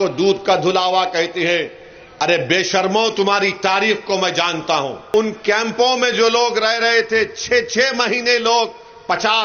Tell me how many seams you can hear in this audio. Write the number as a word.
one